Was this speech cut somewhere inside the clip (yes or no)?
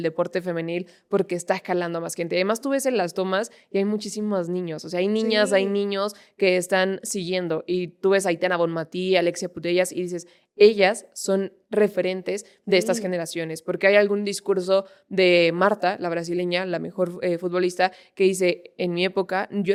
no